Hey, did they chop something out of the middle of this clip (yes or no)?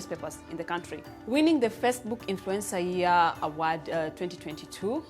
yes